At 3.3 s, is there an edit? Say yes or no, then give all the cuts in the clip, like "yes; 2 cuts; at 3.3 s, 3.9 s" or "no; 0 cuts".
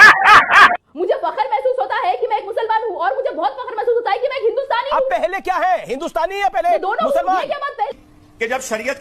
no; 2 cuts; at 0.7 s, 7.9 s